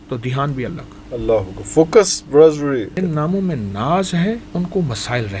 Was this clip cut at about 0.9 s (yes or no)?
yes